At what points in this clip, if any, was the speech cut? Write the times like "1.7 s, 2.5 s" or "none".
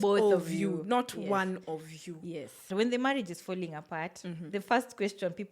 2.6 s